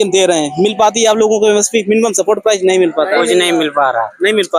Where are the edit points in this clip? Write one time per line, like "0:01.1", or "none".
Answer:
none